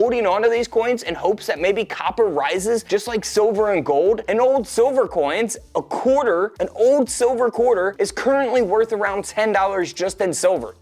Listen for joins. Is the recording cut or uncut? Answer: uncut